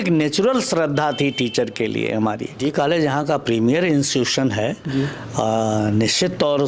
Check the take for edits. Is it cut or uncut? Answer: cut